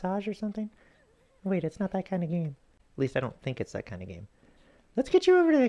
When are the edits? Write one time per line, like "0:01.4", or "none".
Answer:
0:02.8